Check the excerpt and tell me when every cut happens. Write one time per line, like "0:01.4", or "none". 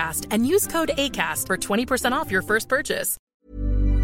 0:03.1